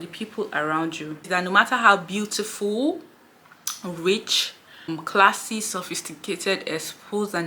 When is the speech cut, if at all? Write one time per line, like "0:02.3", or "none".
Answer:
0:01.3
0:04.9